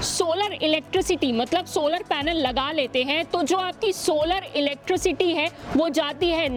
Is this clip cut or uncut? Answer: uncut